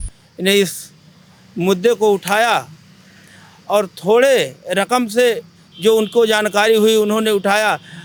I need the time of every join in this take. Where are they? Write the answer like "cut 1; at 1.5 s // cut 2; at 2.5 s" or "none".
none